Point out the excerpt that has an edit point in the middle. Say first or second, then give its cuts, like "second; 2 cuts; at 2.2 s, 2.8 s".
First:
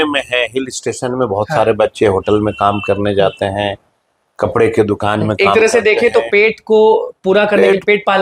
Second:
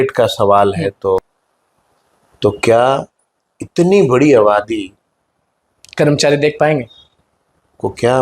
second; 1 cut; at 1.2 s